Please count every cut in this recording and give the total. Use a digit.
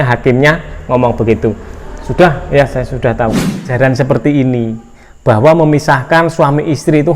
1